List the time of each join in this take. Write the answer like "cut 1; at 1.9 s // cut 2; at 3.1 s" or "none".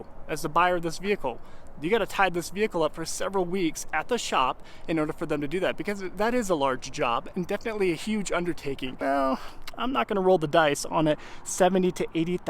cut 1; at 9.0 s